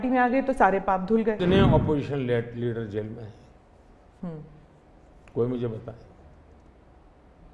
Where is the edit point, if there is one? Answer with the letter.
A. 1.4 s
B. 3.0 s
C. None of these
A